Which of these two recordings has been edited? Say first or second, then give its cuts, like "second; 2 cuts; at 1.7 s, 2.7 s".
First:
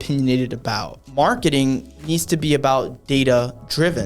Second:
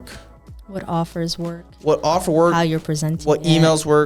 first; 1 cut; at 0.9 s